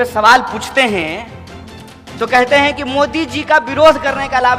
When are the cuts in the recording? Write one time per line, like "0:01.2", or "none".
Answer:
none